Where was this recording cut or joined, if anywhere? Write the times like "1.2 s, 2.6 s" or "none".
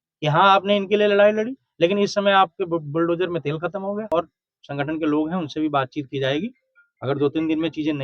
4.1 s